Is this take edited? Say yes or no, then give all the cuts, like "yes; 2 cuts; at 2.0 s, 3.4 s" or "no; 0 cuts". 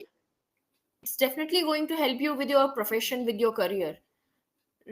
yes; 1 cut; at 1.0 s